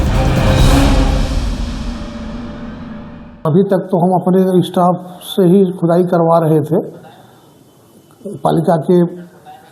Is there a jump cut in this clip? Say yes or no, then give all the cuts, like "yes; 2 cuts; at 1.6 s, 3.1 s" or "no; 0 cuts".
yes; 1 cut; at 3.3 s